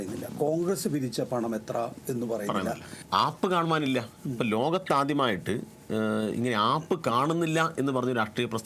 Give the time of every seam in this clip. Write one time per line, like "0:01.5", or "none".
0:03.0